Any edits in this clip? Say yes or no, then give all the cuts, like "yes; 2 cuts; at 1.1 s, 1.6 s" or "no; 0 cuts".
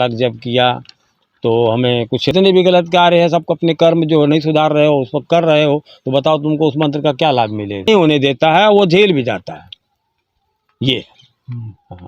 yes; 2 cuts; at 2.3 s, 7.9 s